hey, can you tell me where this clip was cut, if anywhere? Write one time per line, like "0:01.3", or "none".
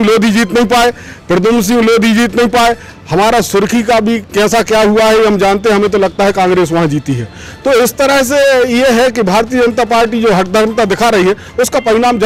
none